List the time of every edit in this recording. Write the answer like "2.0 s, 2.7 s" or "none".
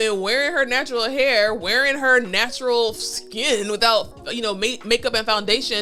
none